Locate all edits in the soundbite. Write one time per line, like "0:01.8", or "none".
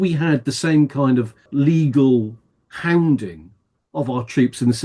0:01.4